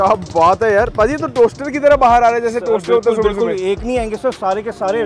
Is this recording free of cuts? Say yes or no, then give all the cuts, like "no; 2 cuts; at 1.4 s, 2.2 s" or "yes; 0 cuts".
yes; 0 cuts